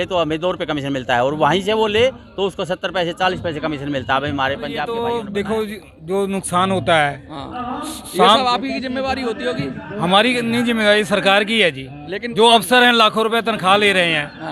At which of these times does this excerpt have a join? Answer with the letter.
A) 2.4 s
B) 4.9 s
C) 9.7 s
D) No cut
B